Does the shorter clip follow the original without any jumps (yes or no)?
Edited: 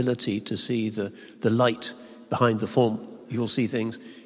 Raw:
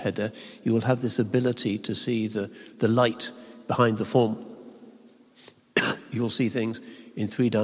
no